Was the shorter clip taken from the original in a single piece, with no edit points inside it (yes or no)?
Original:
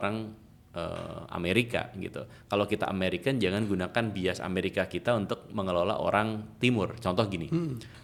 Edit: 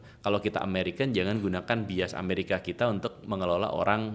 yes